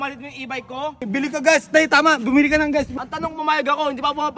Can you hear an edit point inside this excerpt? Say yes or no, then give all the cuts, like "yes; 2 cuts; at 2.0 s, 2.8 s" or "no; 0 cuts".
yes; 2 cuts; at 1.1 s, 2.9 s